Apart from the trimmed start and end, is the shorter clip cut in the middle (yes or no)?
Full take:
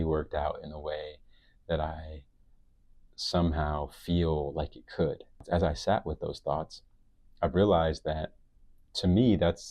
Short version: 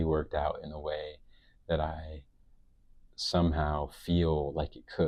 no